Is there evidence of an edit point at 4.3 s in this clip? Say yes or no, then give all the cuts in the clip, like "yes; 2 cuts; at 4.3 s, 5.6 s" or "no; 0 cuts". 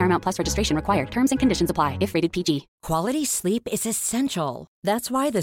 no; 1 cut; at 2.7 s